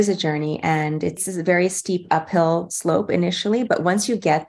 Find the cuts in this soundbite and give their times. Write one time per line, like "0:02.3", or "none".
0:01.2